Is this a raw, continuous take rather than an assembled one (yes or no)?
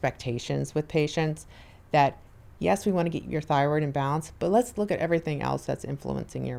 yes